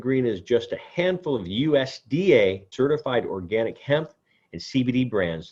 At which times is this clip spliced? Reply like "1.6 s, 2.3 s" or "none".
2.7 s